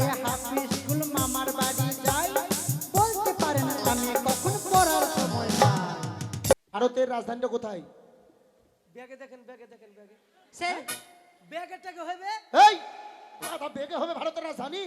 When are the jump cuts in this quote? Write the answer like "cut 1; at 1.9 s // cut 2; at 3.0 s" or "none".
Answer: cut 1; at 6.5 s